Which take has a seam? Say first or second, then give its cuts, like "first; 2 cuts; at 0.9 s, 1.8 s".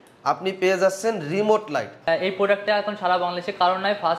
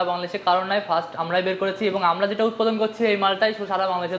first; 1 cut; at 2.1 s